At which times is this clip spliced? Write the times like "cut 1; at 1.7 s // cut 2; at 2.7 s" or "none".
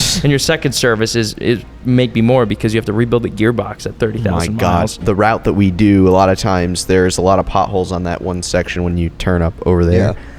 cut 1; at 5.0 s